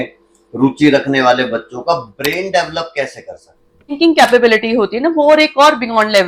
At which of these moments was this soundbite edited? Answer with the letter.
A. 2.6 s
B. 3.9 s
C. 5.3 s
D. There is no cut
B